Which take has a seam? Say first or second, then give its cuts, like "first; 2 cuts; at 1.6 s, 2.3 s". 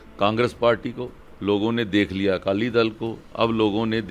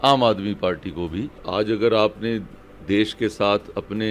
second; 1 cut; at 1.4 s